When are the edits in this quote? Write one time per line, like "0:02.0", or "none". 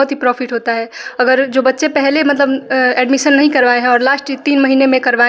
none

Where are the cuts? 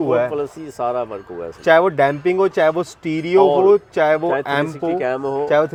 none

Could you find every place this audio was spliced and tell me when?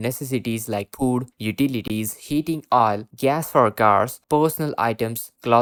none

